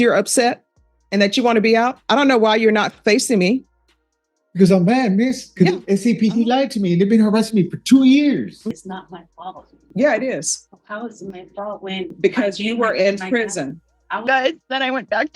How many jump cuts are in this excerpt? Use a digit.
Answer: 2